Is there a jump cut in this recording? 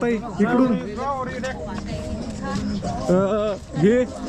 no; 0 cuts

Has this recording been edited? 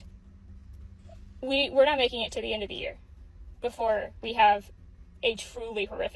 no; 0 cuts

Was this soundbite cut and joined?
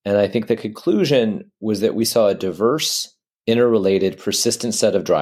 no; 0 cuts

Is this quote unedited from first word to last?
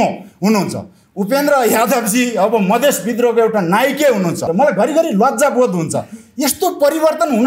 no; 1 cut; at 4.5 s

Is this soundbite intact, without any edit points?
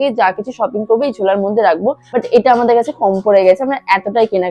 no; 1 cut; at 2.1 s

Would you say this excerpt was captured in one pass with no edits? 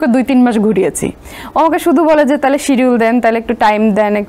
yes; 0 cuts

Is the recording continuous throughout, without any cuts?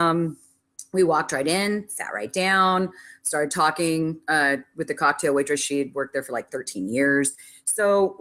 yes; 0 cuts

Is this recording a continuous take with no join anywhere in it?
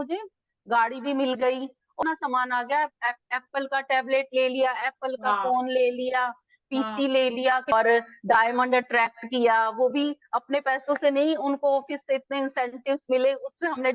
no; 2 cuts; at 2.0 s, 7.7 s

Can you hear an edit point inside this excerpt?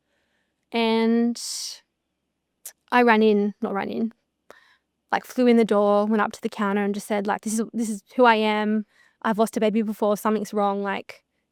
no; 0 cuts

